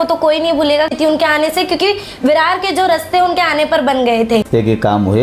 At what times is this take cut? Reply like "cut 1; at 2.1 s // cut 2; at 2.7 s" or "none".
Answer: cut 1; at 0.9 s // cut 2; at 4.5 s